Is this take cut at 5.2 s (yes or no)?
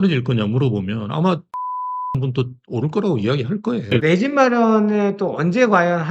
no